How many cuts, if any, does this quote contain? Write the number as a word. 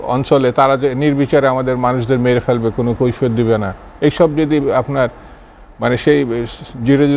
zero